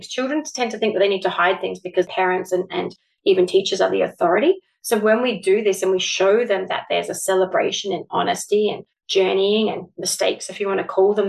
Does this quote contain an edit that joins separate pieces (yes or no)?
yes